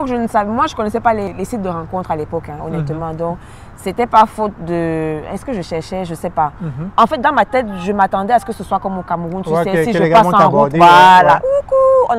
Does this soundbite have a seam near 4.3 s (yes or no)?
no